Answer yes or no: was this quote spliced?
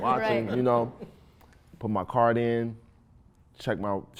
no